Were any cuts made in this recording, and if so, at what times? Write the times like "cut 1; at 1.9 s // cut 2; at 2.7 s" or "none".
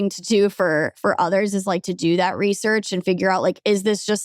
none